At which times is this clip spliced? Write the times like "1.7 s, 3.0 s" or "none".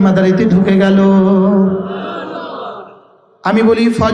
none